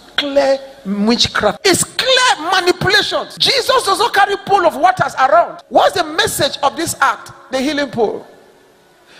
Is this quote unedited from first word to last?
no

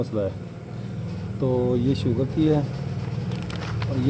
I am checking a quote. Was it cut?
no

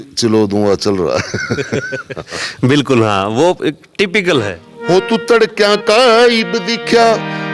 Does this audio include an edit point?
yes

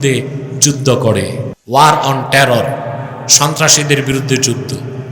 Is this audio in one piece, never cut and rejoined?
no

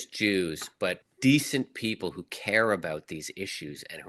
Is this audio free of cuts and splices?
no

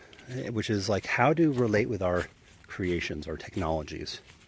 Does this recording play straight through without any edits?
no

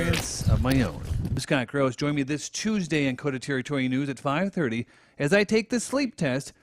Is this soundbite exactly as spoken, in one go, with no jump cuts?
no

